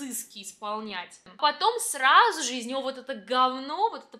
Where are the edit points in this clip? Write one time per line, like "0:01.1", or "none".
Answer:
0:01.3